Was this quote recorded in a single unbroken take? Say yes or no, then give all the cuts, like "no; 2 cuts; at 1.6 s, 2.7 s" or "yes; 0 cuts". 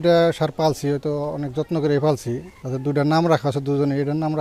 yes; 0 cuts